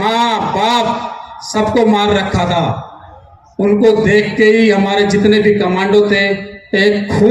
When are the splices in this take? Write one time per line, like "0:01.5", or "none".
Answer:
none